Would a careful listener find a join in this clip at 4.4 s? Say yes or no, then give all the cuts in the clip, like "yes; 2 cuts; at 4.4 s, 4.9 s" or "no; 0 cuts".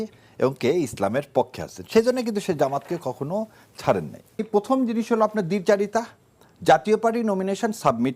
yes; 1 cut; at 4.4 s